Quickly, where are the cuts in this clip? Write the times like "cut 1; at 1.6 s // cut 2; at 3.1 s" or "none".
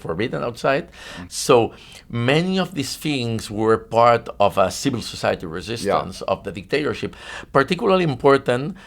cut 1; at 1.2 s